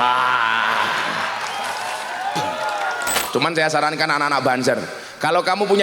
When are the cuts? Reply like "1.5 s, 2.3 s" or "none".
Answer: 3.2 s